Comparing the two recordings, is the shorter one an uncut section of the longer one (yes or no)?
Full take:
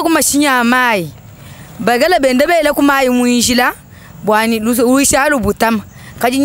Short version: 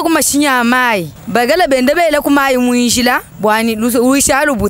no